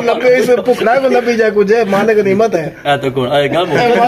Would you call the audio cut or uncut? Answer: uncut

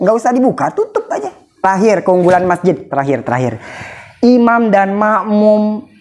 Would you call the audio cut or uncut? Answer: cut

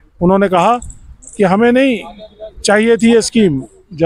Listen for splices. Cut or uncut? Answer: uncut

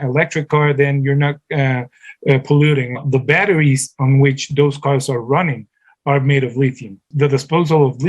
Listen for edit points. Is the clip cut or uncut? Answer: cut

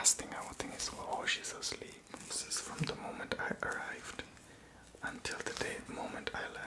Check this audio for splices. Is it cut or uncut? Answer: cut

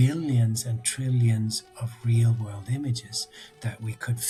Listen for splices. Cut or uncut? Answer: uncut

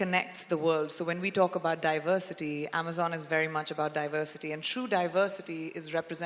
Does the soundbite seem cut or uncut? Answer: uncut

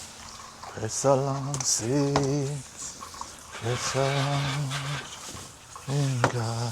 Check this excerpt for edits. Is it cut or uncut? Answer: uncut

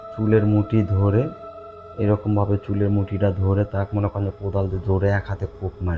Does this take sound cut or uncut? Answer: uncut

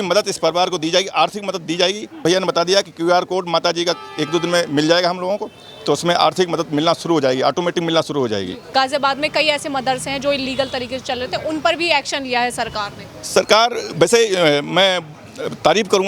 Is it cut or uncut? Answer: cut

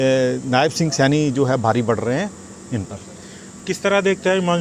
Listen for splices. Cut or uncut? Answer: uncut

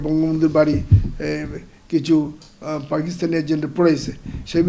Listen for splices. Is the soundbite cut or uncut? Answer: uncut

